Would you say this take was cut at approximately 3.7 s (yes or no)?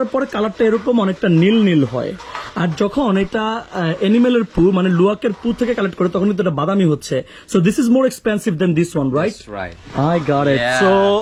no